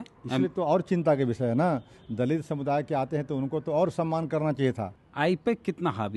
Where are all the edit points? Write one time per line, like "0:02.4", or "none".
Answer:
0:05.0